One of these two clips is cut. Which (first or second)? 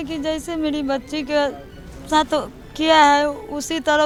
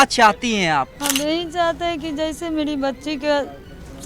second